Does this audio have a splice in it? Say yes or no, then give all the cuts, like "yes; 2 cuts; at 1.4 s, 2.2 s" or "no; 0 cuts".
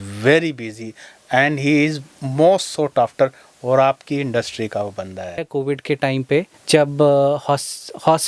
yes; 1 cut; at 5.4 s